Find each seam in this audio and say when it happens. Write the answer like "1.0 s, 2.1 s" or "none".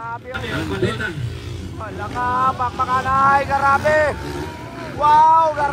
1.0 s